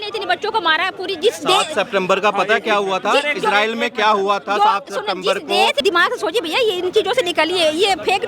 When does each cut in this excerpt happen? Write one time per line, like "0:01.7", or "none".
0:05.8